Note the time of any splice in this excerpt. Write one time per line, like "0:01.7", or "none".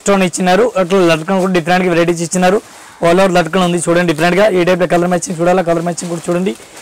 none